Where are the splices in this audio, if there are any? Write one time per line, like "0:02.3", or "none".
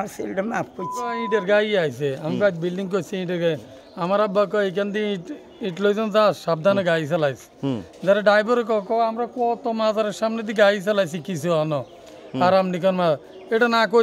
0:01.2